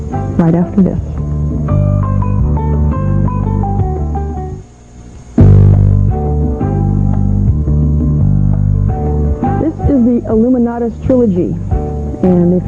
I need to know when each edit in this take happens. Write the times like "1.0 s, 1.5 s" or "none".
8.2 s